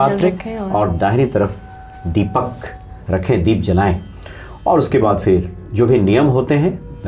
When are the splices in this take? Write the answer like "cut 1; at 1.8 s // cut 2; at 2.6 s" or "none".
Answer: none

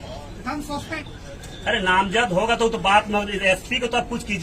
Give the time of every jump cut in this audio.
cut 1; at 1.0 s

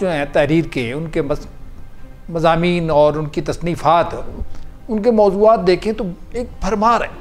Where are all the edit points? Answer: none

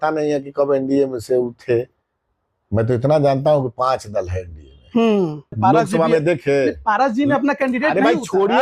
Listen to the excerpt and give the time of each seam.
cut 1; at 5.5 s

